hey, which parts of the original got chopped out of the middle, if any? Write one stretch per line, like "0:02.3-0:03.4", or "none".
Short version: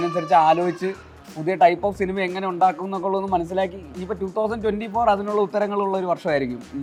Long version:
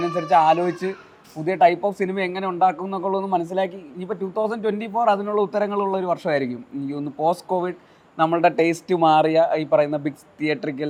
none